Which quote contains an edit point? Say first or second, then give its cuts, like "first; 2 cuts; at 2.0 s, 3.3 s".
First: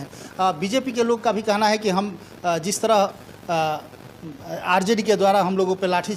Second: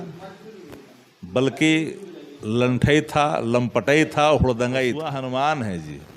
second; 1 cut; at 5.0 s